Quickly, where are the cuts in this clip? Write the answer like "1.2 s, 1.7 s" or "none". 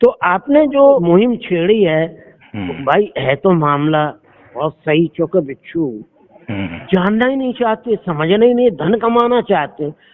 1.0 s